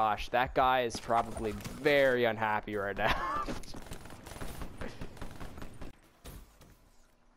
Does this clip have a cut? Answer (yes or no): yes